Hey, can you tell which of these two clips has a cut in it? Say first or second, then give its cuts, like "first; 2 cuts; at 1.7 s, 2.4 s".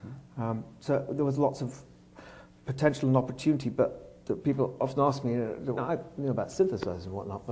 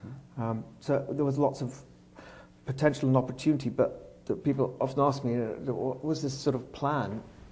second; 1 cut; at 5.8 s